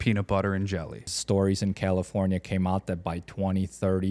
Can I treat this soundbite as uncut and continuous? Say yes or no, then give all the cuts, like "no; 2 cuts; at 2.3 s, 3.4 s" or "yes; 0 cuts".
no; 1 cut; at 1.1 s